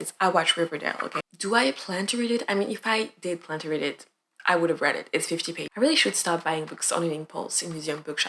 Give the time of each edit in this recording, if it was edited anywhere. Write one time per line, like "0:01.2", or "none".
0:01.1
0:05.6